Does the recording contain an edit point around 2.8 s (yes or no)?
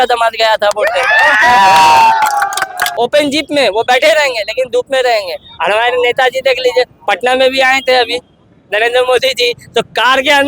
yes